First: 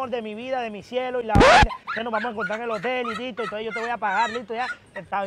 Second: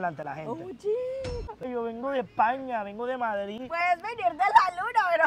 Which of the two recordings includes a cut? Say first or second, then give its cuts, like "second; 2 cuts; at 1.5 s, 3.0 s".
second; 1 cut; at 1.5 s